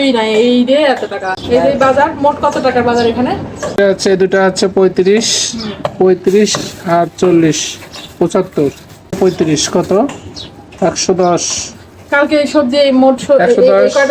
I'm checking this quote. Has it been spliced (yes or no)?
yes